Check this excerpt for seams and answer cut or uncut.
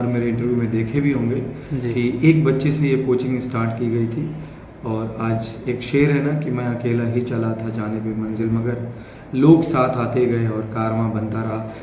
uncut